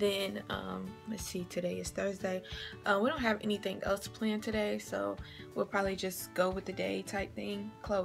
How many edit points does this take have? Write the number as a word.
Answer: one